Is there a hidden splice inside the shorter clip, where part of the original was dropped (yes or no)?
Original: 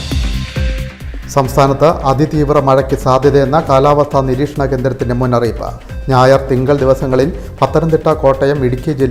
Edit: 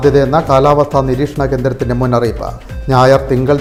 no